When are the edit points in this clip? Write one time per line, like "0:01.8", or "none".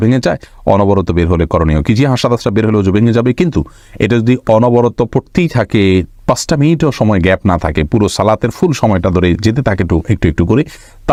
none